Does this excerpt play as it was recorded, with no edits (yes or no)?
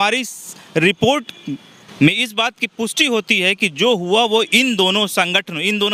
yes